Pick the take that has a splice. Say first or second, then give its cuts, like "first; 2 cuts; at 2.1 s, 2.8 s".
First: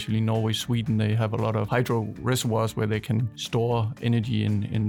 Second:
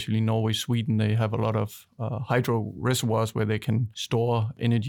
first; 1 cut; at 1.7 s